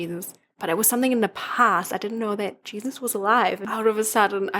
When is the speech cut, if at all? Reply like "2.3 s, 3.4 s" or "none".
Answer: 3.6 s